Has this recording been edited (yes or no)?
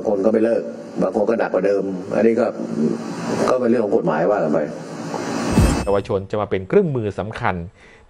yes